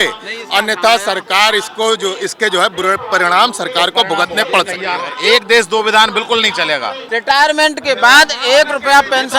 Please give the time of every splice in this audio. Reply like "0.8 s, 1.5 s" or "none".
5.1 s, 7.0 s